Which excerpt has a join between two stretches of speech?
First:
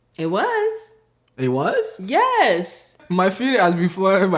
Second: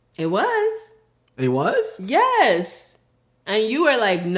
first; 1 cut; at 3.0 s

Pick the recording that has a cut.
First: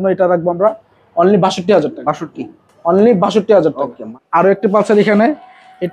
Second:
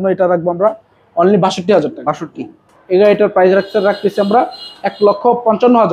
second; 1 cut; at 2.7 s

